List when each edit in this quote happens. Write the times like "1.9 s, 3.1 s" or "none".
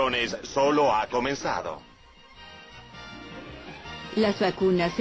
2.4 s